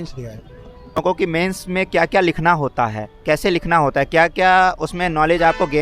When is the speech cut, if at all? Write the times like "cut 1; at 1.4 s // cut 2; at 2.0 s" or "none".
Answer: cut 1; at 1.0 s

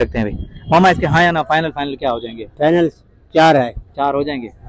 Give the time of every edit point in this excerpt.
none

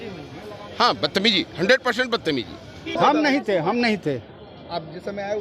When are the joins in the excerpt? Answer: cut 1; at 3.0 s

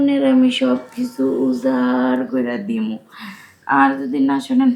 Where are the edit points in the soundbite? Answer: none

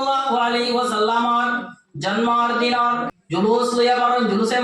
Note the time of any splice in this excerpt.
cut 1; at 3.4 s

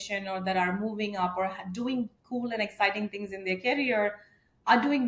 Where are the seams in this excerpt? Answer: none

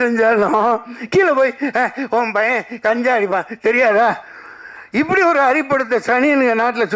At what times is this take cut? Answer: none

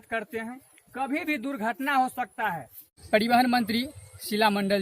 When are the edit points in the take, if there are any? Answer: cut 1; at 3.0 s

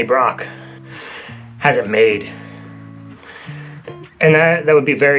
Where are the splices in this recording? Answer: cut 1; at 1.0 s

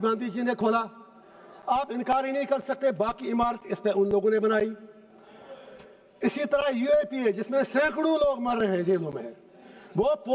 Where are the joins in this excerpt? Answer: none

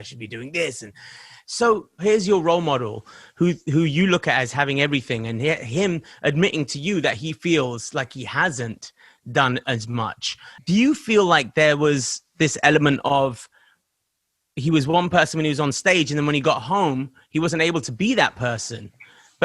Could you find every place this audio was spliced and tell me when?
cut 1; at 2.0 s // cut 2; at 10.5 s

